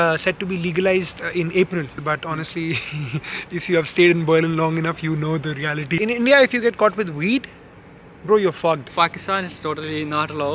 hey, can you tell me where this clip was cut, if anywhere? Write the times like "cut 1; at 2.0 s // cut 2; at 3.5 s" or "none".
cut 1; at 2.0 s // cut 2; at 6.0 s // cut 3; at 8.9 s